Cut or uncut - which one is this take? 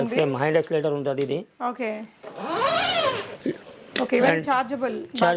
uncut